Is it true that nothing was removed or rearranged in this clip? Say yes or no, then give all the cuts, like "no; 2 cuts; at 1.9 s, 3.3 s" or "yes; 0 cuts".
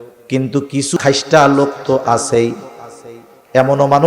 no; 1 cut; at 1.0 s